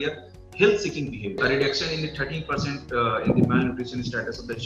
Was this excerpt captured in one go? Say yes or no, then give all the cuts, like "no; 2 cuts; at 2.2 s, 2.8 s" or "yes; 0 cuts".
no; 1 cut; at 1.4 s